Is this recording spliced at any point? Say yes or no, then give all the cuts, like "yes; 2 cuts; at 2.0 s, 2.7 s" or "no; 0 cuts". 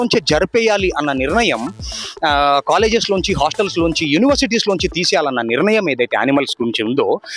no; 0 cuts